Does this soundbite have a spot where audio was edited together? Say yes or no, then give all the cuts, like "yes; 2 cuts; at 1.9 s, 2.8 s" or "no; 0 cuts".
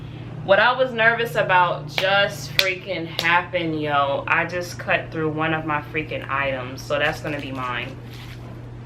no; 0 cuts